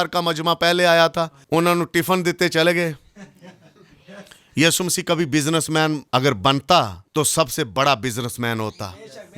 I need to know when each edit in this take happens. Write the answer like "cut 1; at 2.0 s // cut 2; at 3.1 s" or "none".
cut 1; at 1.4 s // cut 2; at 6.0 s // cut 3; at 7.0 s

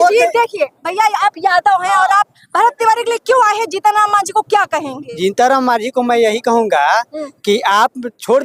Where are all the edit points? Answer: none

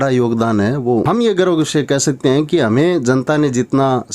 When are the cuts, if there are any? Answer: cut 1; at 1.0 s

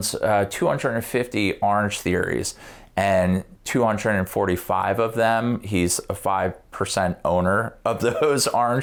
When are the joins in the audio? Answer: none

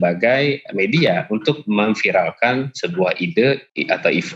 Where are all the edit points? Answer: none

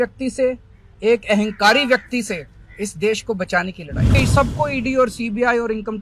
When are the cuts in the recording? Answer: cut 1; at 4.2 s

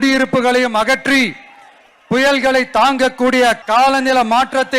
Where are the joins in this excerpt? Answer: cut 1; at 3.6 s

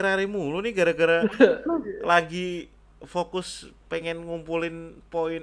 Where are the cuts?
none

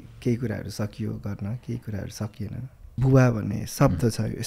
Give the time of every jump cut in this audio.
cut 1; at 3.0 s

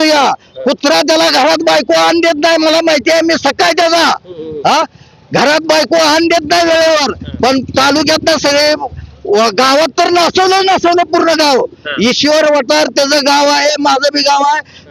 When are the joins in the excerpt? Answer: none

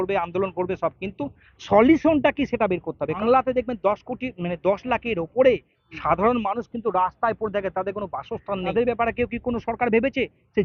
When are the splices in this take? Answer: cut 1; at 3.2 s // cut 2; at 8.7 s

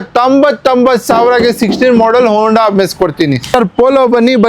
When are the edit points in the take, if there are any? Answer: cut 1; at 3.5 s

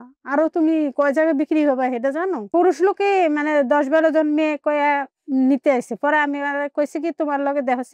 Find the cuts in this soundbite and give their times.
cut 1; at 2.4 s

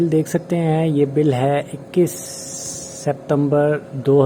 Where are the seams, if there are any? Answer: none

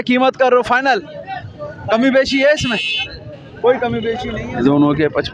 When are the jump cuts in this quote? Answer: cut 1; at 4.2 s

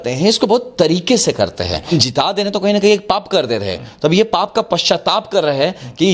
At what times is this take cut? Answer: cut 1; at 1.9 s

